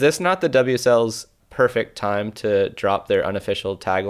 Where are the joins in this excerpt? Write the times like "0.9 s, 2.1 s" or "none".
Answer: 1.4 s